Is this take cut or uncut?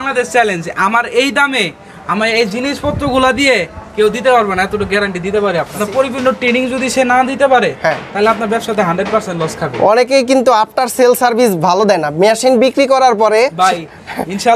cut